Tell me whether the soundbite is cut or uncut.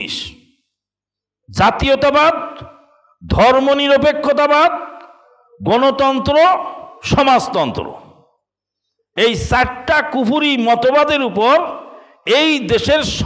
uncut